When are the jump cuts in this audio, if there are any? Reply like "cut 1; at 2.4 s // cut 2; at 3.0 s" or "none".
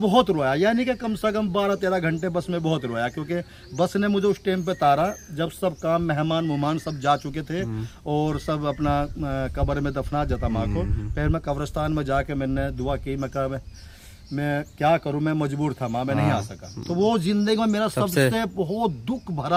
none